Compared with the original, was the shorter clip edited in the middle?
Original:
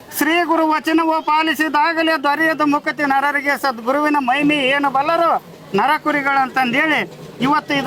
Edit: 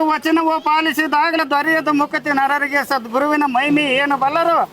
yes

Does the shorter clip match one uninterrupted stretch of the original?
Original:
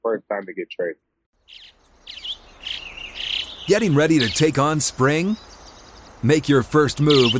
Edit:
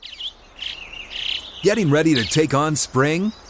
yes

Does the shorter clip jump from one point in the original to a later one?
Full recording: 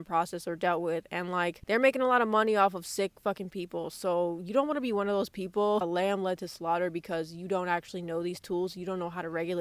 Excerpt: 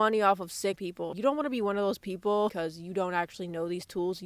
yes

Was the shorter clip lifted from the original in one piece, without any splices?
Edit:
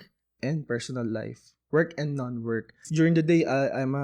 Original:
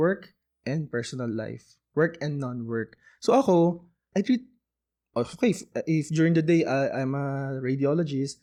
no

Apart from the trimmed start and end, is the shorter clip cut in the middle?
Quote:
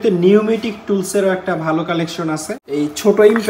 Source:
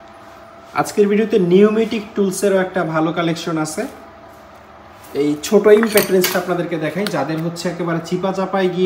yes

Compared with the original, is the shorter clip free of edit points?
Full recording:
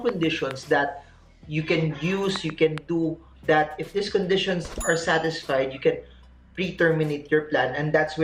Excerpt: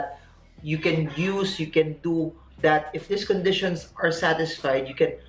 yes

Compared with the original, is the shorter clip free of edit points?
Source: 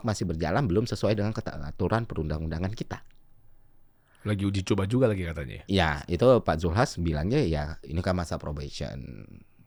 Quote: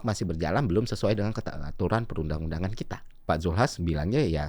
no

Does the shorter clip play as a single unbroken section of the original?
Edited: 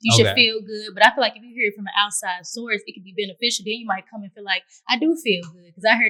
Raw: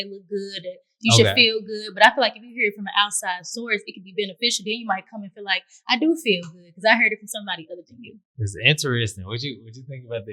yes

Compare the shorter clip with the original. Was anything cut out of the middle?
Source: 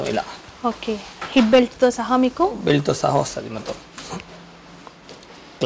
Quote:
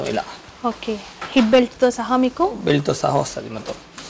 no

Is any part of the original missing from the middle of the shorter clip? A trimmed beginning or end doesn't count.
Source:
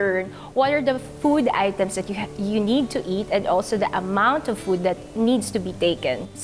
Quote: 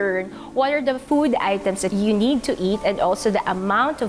yes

